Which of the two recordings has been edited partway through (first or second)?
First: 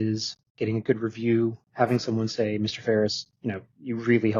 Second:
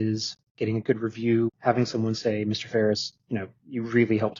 second